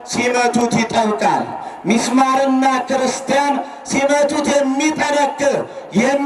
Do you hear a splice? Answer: no; 0 cuts

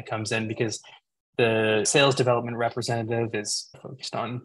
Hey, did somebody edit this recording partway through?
yes; 1 cut; at 1.9 s

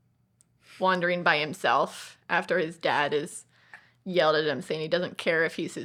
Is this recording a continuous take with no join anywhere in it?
yes; 0 cuts

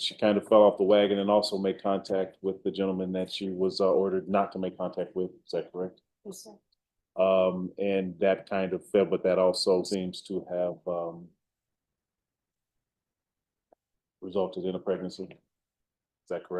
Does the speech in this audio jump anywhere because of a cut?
yes; 1 cut; at 9.9 s

